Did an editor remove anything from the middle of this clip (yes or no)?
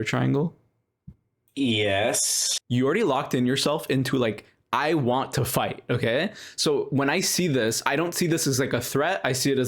yes